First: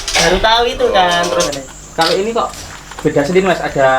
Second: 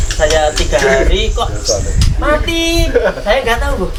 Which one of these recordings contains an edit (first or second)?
first